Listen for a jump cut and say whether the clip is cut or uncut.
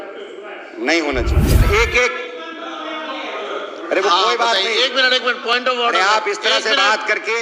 cut